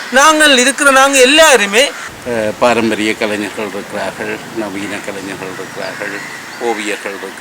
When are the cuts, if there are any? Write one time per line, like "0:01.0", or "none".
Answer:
0:02.0